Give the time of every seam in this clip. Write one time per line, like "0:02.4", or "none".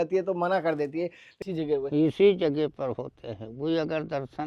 0:01.2